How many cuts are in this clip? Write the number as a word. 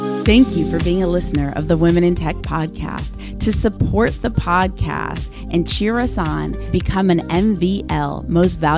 zero